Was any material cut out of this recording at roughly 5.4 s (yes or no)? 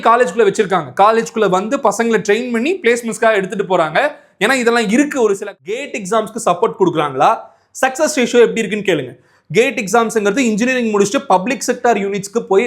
yes